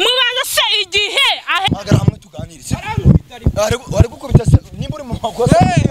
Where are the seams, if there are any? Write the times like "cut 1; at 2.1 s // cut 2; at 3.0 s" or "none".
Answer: cut 1; at 1.7 s